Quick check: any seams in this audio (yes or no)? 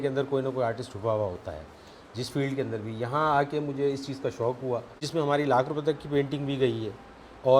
yes